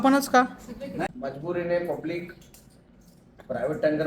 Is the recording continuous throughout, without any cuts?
no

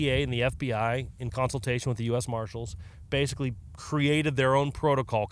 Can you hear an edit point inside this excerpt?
no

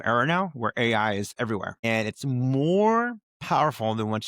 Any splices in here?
yes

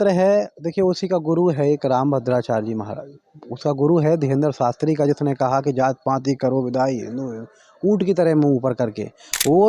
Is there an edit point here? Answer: no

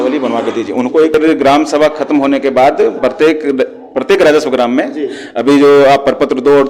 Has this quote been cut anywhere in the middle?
yes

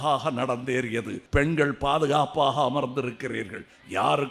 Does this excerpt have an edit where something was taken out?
yes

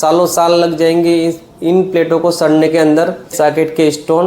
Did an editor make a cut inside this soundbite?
yes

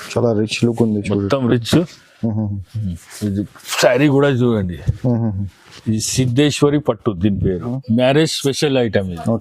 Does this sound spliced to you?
yes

